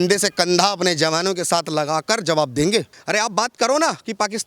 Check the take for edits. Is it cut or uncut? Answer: cut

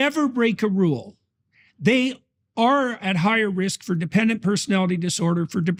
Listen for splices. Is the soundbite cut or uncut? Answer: uncut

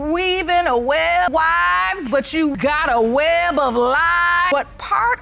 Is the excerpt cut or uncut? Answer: cut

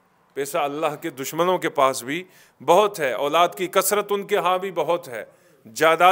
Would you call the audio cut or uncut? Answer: uncut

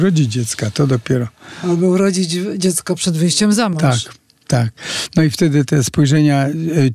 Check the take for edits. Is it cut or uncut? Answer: uncut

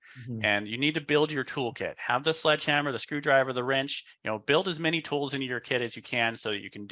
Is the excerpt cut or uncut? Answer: uncut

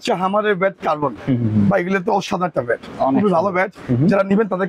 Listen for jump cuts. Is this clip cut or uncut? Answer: uncut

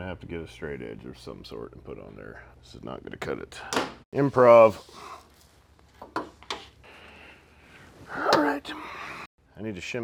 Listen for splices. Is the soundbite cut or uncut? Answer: uncut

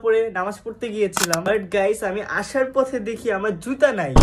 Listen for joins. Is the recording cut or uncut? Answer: uncut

